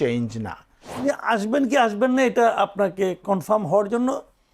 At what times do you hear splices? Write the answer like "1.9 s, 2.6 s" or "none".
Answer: 1.0 s

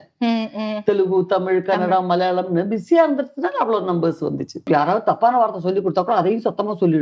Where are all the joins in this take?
4.6 s

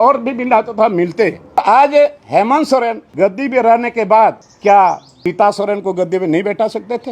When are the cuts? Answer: 1.6 s, 3.0 s, 4.5 s, 5.1 s

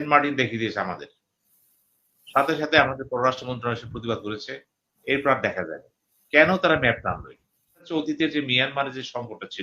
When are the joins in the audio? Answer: 7.9 s

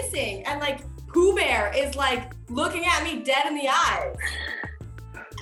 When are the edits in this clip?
none

